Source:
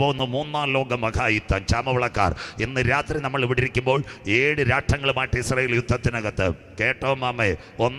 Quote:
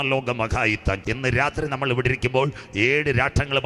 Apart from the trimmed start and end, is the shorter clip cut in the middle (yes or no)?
yes